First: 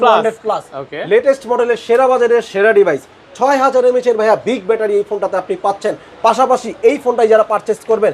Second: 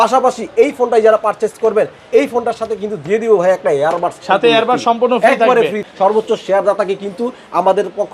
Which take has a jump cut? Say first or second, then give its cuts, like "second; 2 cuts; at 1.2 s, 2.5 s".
second; 1 cut; at 5.8 s